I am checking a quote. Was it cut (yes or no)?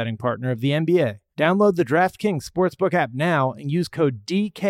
yes